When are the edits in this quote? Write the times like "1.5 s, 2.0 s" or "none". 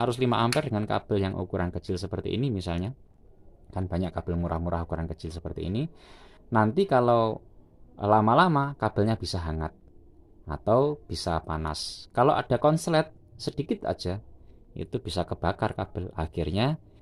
none